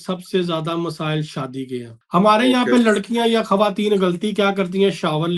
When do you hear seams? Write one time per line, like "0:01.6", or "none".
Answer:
0:02.0